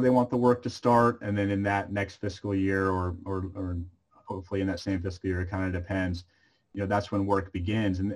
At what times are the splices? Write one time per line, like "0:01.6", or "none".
none